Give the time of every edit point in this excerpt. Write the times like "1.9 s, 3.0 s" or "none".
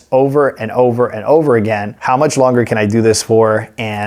1.9 s